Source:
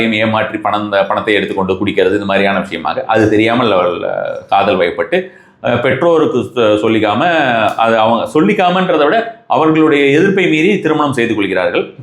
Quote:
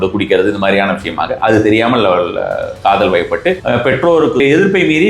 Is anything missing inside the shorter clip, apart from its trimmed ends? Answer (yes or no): yes